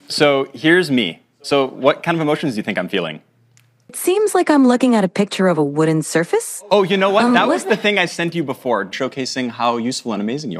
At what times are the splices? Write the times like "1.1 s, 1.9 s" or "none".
4.0 s, 8.9 s